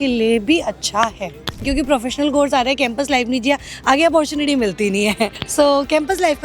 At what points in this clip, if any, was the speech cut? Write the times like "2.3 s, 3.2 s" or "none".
1.6 s, 5.4 s